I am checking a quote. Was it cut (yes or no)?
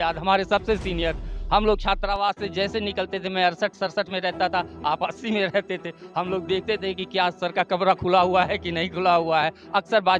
no